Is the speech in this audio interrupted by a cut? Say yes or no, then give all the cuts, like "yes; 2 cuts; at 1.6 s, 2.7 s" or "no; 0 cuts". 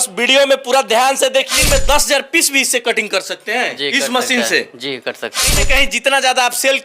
yes; 2 cuts; at 1.6 s, 5.5 s